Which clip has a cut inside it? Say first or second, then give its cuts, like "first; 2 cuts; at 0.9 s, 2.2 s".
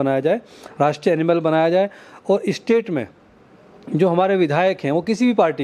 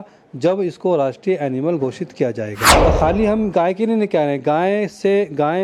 second; 1 cut; at 2.6 s